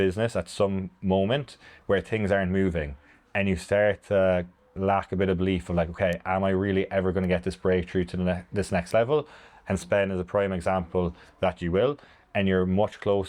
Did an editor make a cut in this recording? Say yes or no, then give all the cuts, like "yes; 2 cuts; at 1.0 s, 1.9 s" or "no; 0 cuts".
no; 0 cuts